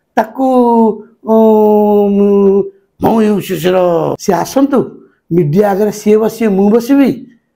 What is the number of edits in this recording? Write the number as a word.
one